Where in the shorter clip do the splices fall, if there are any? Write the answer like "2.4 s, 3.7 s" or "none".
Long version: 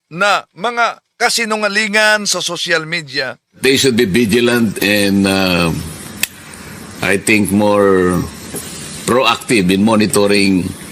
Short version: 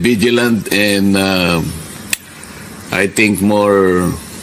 none